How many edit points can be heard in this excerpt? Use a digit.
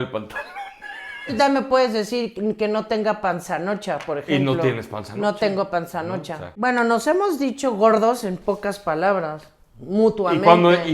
2